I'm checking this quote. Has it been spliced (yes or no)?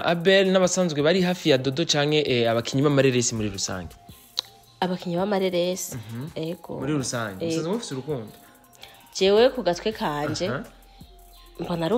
no